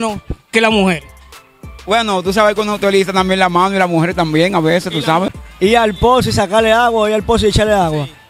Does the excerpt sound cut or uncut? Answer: cut